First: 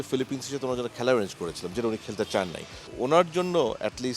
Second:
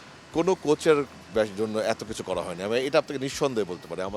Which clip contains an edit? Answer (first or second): first